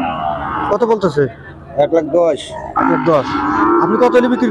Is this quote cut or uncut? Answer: uncut